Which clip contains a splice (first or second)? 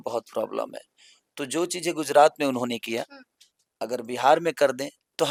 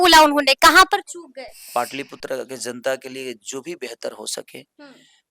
second